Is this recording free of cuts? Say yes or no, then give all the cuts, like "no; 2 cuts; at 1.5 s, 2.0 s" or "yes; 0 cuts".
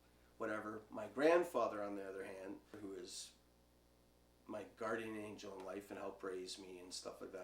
no; 1 cut; at 2.8 s